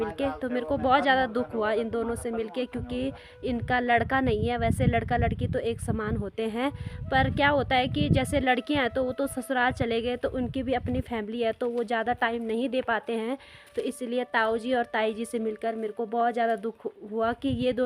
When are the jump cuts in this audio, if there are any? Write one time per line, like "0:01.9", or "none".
none